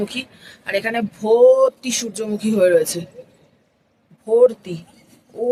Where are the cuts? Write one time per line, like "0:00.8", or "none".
none